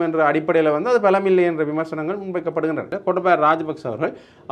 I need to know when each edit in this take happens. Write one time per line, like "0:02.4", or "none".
0:02.9